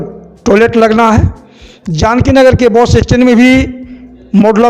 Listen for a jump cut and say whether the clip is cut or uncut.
uncut